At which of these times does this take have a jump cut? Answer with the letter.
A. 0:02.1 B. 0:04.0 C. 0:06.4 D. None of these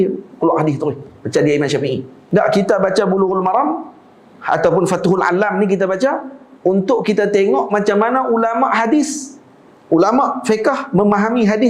A